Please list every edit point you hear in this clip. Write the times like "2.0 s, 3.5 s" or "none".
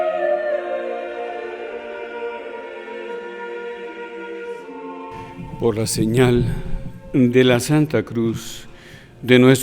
5.4 s